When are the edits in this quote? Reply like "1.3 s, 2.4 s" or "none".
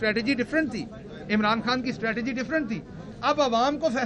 none